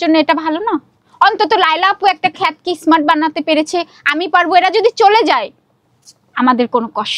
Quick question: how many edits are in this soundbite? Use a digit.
1